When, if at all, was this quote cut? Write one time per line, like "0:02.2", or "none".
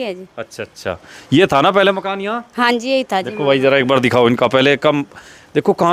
none